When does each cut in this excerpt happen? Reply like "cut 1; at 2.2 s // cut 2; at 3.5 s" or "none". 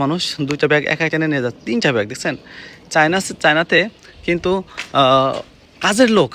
none